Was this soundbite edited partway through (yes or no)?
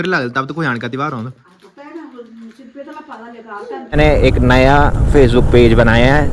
yes